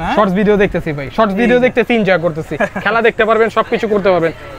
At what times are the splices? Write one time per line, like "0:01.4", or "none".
none